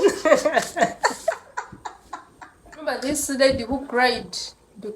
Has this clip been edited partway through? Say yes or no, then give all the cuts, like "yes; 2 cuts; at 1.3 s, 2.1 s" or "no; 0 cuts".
yes; 1 cut; at 2.9 s